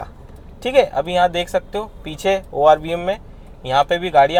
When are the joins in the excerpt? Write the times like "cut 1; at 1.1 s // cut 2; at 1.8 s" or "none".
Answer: none